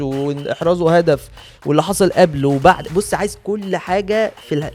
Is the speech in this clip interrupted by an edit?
no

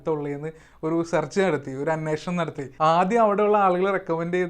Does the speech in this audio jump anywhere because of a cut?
yes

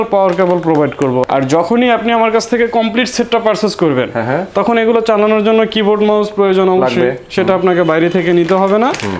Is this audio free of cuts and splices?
no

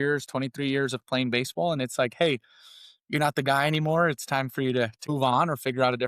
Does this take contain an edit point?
yes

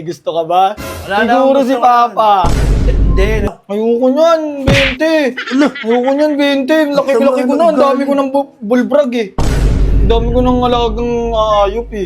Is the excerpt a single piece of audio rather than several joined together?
no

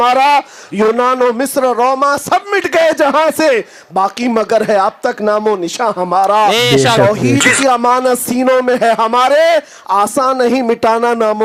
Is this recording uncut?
yes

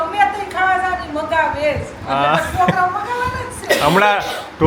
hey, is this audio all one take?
yes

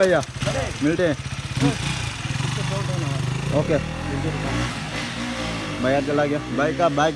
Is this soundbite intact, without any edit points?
yes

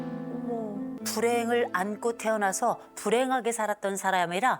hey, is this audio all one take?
no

